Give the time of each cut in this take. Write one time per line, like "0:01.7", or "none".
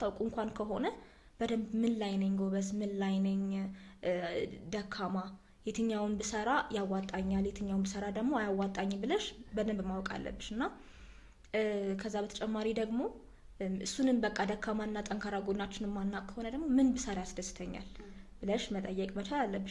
none